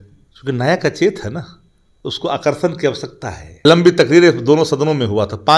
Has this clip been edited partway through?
yes; 1 cut; at 3.7 s

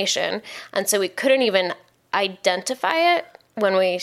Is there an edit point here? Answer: no; 0 cuts

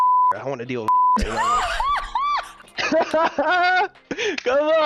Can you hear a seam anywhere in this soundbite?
no; 0 cuts

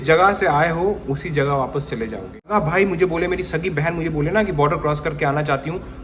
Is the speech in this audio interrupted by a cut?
yes; 1 cut; at 2.5 s

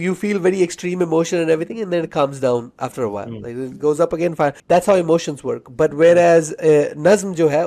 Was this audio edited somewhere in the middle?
yes; 1 cut; at 4.6 s

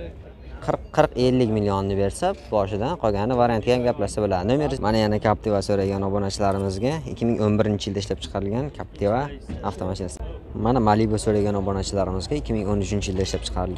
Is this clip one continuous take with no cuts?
no; 2 cuts; at 4.8 s, 10.1 s

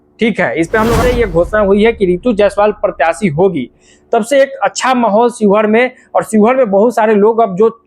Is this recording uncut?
no; 1 cut; at 1.0 s

